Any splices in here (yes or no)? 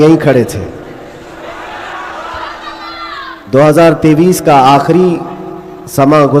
no